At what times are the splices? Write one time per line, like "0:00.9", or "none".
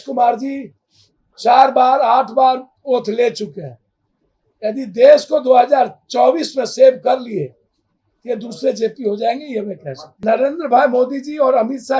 0:10.2